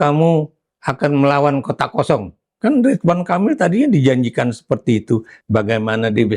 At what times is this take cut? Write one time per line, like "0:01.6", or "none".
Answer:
0:05.3

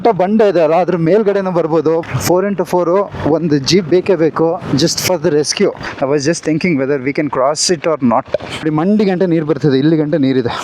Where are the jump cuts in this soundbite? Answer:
0:02.0
0:05.9
0:08.6

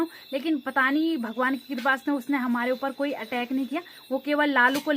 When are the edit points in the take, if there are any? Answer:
none

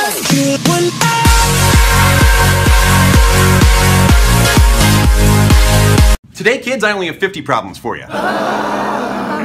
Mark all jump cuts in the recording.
none

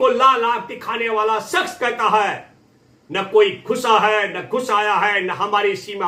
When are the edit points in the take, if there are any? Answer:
none

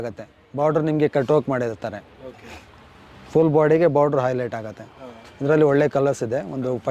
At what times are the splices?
none

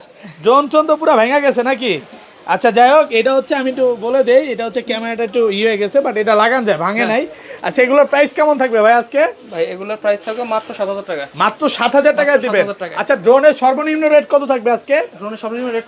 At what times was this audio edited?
none

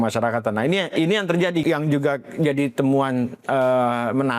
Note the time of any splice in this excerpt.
0:01.6

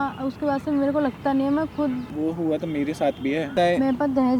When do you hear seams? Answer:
0:02.1
0:03.5

